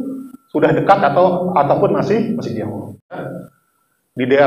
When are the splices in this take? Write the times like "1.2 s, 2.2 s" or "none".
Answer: 3.2 s